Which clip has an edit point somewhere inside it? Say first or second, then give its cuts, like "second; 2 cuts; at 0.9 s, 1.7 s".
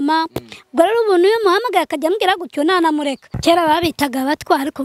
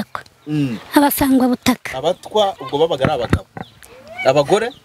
first; 1 cut; at 3.3 s